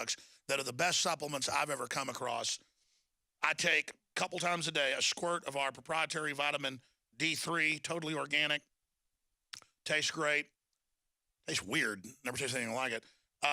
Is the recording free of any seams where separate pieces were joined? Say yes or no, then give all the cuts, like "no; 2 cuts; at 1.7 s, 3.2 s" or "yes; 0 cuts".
no; 1 cut; at 12.0 s